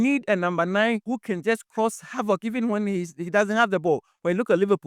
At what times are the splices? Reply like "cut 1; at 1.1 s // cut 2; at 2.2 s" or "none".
cut 1; at 1.0 s